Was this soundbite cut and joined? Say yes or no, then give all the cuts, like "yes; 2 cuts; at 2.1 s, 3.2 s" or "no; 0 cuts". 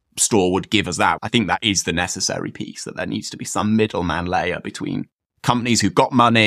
yes; 1 cut; at 1.2 s